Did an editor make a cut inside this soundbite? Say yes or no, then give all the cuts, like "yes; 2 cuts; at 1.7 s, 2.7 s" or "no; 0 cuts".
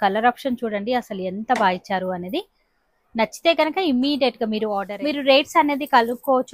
yes; 1 cut; at 4.9 s